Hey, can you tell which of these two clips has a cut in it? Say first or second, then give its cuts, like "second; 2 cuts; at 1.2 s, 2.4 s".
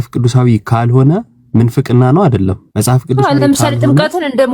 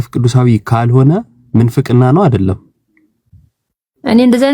first; 1 cut; at 2.7 s